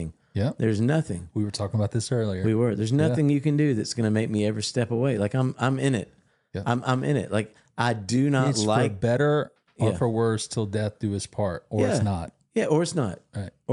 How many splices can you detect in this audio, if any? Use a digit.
0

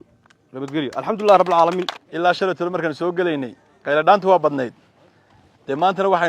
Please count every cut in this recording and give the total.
1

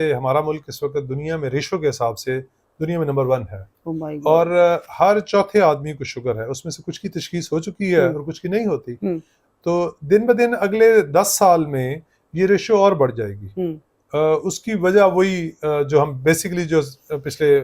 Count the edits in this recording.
0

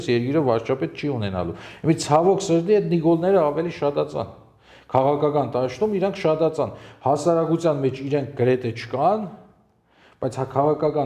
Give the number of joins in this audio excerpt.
0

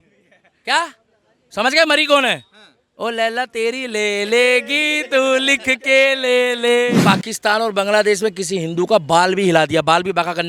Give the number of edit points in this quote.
1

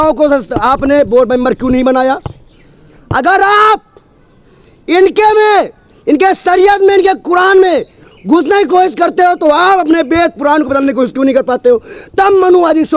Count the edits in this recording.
0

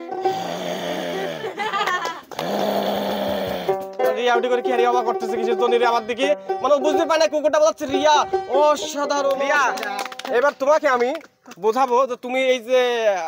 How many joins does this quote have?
1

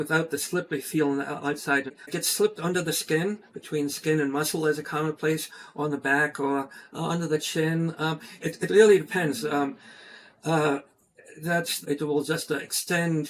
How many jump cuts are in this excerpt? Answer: 2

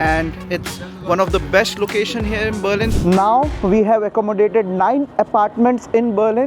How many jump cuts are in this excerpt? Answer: 1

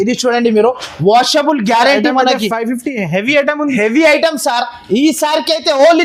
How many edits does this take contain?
0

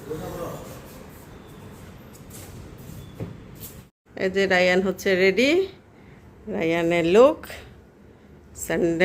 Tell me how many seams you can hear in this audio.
1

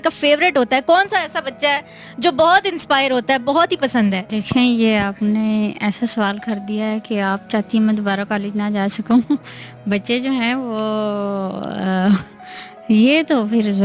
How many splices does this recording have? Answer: 1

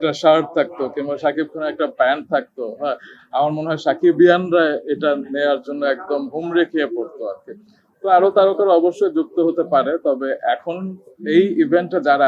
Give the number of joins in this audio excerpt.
0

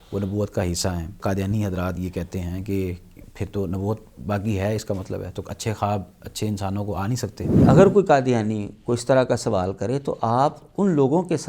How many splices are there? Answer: 2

